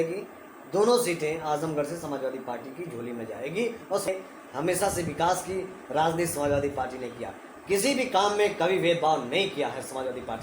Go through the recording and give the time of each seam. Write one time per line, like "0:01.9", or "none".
0:04.1